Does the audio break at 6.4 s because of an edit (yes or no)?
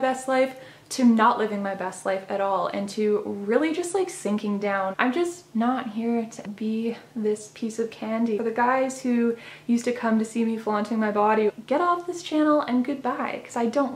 yes